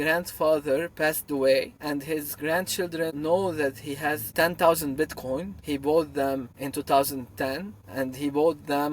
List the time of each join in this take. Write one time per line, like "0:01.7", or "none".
0:01.8
0:03.1
0:04.3
0:05.5
0:06.6
0:07.8